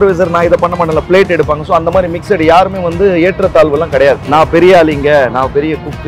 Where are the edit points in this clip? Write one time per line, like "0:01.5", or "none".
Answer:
none